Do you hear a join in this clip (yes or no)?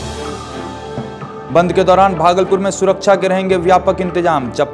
yes